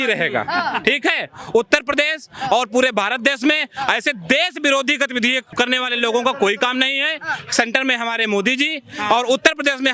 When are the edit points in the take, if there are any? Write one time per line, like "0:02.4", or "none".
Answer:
0:05.5

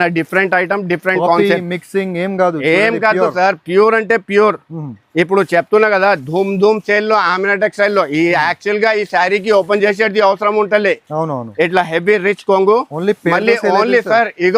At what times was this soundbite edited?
none

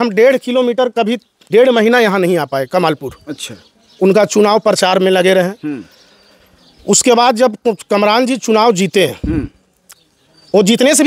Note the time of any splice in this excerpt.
none

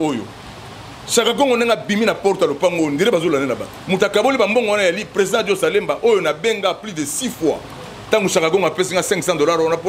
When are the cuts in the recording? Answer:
0:03.7

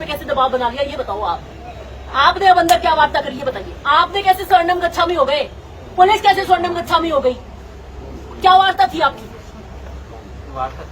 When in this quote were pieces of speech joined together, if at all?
0:03.7

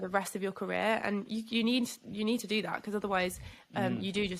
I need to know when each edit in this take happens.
none

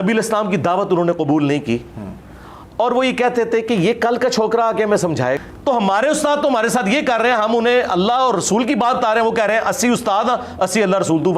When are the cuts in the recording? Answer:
0:05.5

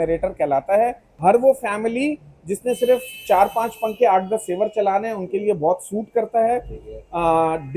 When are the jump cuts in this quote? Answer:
0:01.1

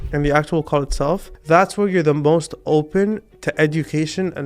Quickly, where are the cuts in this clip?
0:01.3

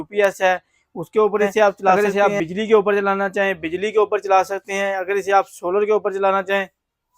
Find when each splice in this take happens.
0:02.0

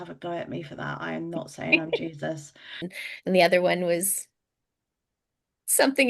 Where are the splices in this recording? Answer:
0:02.9

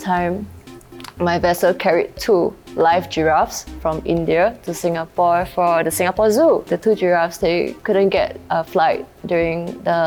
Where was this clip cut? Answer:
none

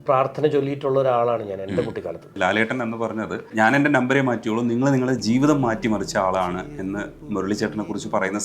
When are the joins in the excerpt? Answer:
0:02.4
0:03.5

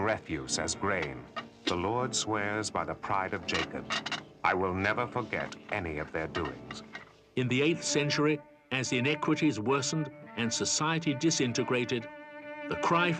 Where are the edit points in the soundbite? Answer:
0:12.3

